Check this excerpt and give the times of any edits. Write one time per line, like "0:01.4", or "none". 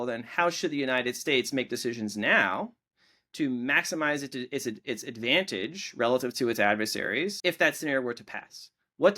0:07.4